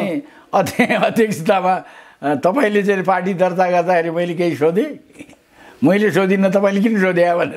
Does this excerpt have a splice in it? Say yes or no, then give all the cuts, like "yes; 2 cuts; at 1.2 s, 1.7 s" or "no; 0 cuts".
no; 0 cuts